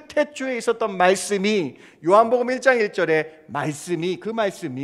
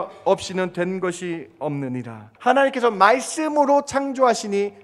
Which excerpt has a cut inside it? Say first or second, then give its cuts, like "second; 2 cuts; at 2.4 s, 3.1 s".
second; 1 cut; at 2.2 s